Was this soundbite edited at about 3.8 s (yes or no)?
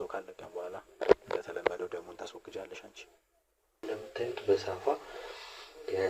yes